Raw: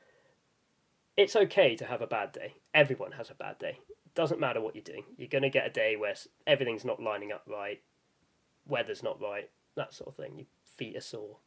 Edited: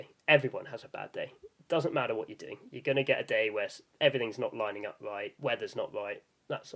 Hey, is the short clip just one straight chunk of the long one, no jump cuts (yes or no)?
no